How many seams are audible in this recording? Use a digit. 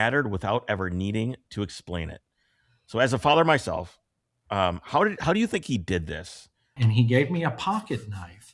1